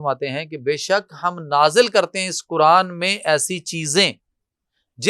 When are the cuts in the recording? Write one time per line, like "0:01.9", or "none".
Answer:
none